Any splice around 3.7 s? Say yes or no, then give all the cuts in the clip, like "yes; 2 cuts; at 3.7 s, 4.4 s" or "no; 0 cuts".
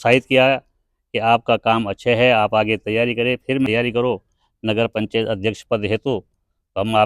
yes; 1 cut; at 3.7 s